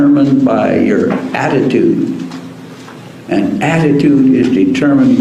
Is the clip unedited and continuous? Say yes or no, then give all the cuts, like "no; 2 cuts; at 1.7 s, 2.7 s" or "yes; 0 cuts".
yes; 0 cuts